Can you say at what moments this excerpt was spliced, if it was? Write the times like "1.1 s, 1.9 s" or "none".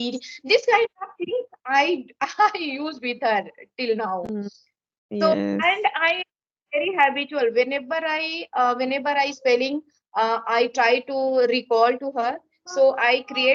none